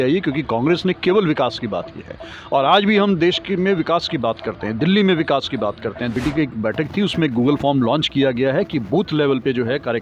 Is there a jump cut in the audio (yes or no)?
yes